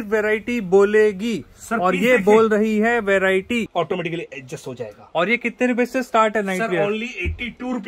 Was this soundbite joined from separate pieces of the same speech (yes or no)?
yes